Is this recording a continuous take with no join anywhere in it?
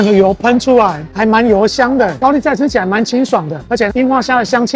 no; 1 cut; at 2.1 s

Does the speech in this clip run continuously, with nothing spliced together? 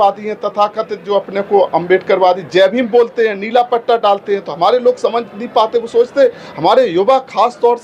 yes; 0 cuts

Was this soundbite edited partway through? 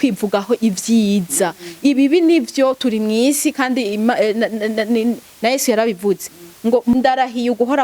yes; 1 cut; at 6.9 s

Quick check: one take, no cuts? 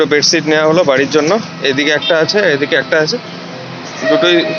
yes; 0 cuts

